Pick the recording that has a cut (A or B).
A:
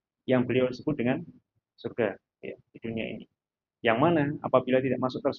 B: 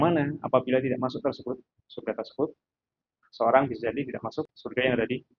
B